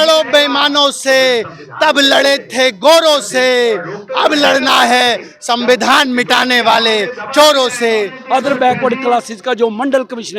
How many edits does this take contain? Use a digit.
1